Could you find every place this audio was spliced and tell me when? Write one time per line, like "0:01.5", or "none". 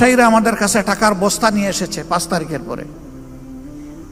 none